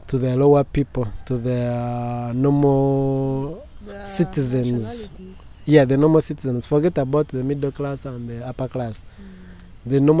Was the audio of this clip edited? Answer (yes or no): no